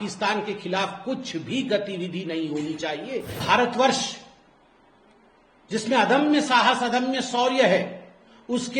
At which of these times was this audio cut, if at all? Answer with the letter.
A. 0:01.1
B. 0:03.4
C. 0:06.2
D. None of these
B